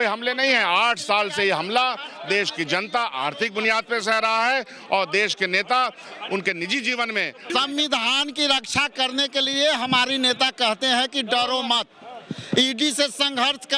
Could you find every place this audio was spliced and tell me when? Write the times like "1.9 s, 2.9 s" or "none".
7.4 s